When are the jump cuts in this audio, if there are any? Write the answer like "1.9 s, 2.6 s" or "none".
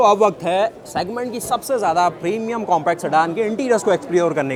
none